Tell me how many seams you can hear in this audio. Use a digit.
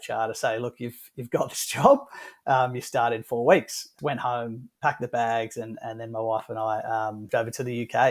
2